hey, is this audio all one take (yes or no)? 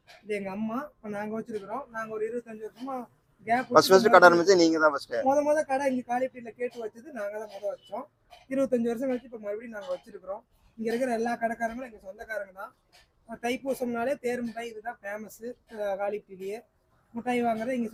yes